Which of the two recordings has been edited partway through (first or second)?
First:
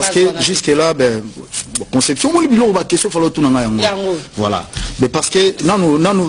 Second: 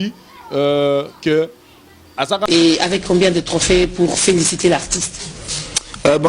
second